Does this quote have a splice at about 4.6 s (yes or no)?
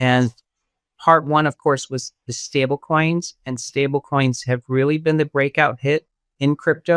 no